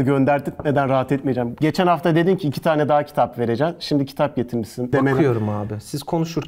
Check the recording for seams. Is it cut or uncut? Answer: cut